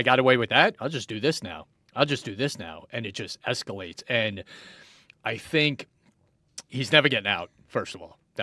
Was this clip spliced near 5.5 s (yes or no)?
no